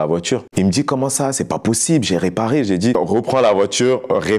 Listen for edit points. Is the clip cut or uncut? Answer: cut